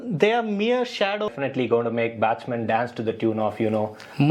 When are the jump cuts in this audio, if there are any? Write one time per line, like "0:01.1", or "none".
0:01.3